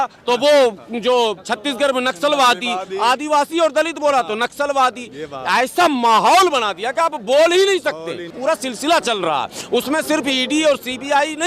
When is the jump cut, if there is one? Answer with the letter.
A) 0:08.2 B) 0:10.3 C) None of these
A